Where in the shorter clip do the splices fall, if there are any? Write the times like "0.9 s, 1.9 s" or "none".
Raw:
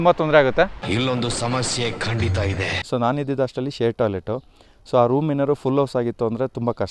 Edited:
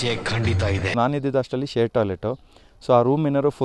0.9 s